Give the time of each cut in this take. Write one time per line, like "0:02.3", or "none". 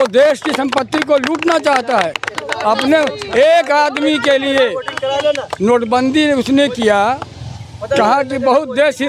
none